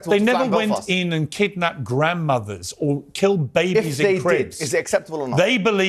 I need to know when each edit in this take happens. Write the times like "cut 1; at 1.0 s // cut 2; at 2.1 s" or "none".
cut 1; at 1.1 s